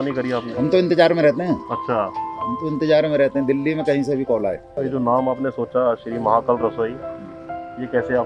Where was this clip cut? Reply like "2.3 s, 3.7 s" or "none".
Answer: 4.7 s